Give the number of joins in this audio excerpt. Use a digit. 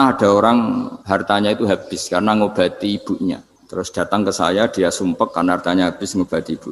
2